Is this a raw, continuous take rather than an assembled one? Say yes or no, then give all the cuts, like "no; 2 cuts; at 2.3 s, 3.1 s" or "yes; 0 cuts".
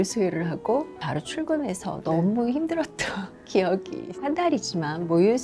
no; 2 cuts; at 1.0 s, 4.2 s